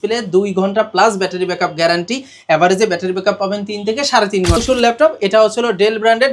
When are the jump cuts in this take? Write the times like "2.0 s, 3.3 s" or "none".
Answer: 4.6 s